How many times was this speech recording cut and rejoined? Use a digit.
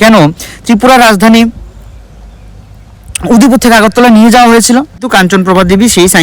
1